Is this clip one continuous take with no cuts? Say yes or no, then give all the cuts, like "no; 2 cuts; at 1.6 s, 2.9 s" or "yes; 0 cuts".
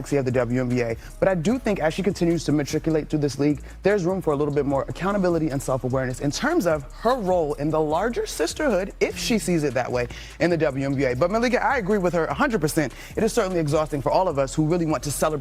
no; 1 cut; at 10.9 s